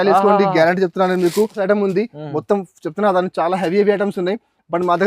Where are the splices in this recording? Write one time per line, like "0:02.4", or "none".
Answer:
0:01.6